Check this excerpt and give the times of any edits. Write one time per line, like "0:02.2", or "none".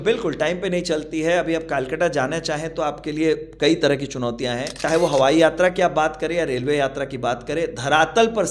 0:04.7